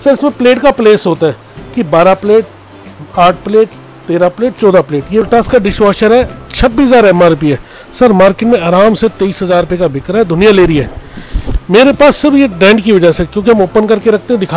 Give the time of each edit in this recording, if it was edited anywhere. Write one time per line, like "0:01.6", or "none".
0:05.2